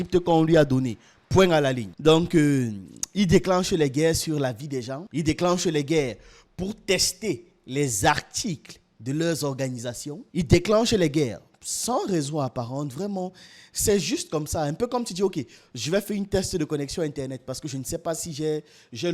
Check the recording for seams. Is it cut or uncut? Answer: cut